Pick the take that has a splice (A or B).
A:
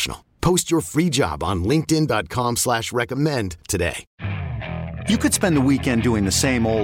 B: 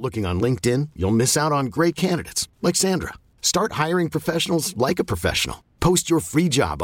A